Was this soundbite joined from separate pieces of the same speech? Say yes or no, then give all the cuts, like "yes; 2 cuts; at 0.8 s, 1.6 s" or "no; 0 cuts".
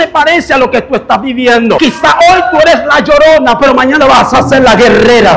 yes; 1 cut; at 1.8 s